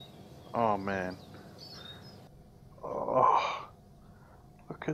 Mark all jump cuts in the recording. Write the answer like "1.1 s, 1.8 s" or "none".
2.3 s